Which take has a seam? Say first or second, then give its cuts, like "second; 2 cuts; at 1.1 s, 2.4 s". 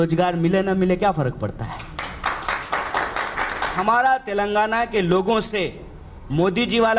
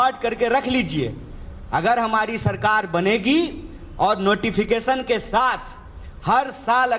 first; 1 cut; at 3.8 s